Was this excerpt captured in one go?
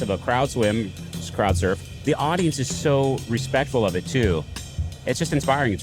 no; 1 cut; at 1.9 s

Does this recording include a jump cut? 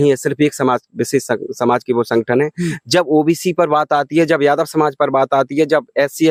no; 0 cuts

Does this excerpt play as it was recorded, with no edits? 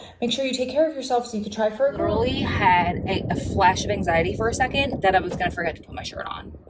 no; 1 cut; at 2.0 s

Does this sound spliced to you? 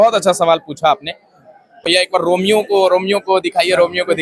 yes; 1 cut; at 1.8 s

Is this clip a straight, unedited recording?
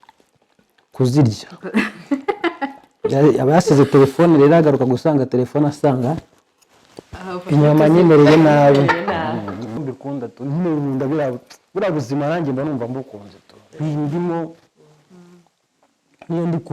no; 1 cut; at 9.8 s

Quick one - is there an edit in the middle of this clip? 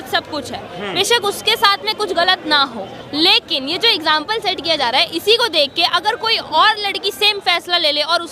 yes; 1 cut; at 3.0 s

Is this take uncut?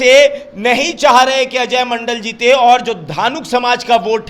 yes; 0 cuts

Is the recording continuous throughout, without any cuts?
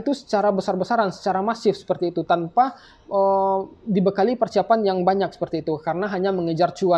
yes; 0 cuts

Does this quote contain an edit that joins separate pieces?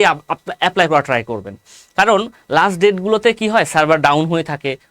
no; 0 cuts

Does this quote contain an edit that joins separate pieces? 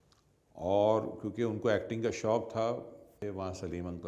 yes; 1 cut; at 3.2 s

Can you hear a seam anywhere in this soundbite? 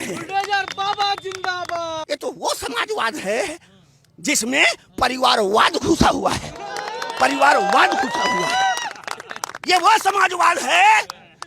yes; 1 cut; at 2.0 s

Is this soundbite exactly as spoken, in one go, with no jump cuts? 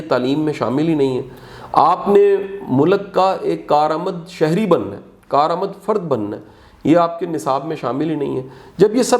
yes; 0 cuts

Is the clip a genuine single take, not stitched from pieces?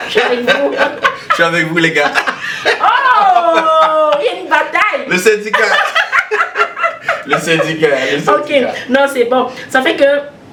yes; 0 cuts

